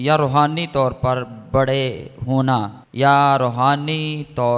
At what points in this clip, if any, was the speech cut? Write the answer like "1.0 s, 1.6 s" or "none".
2.8 s